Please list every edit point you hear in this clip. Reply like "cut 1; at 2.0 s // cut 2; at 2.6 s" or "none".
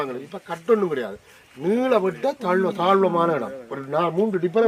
none

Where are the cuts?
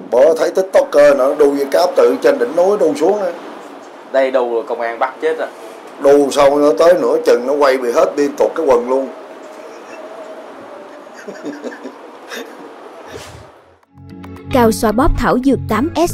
cut 1; at 13.5 s

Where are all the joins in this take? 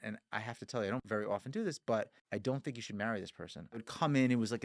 cut 1; at 1.0 s // cut 2; at 2.2 s // cut 3; at 3.8 s

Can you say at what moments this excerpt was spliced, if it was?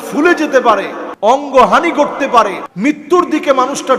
cut 1; at 1.0 s // cut 2; at 2.6 s

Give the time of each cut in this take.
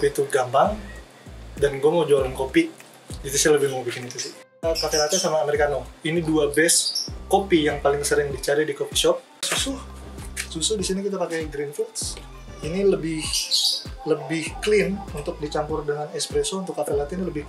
cut 1; at 9.4 s

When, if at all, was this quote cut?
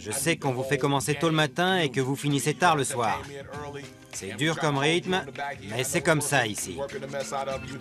cut 1; at 6.7 s

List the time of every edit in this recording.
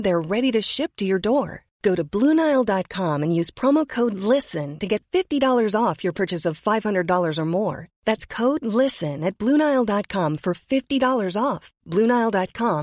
none

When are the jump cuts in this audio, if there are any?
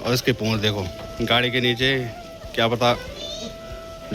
none

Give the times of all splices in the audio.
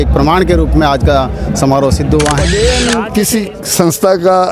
cut 1; at 2.8 s

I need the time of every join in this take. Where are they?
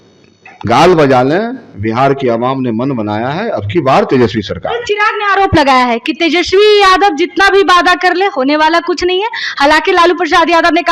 none

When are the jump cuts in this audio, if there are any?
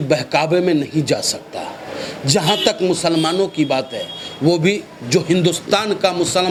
none

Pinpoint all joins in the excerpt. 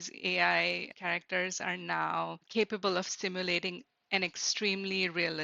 cut 1; at 2.4 s

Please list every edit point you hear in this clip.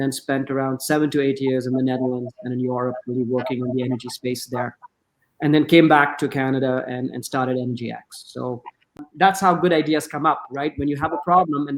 cut 1; at 9.0 s

